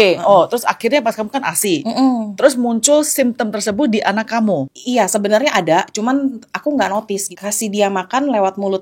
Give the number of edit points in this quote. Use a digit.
2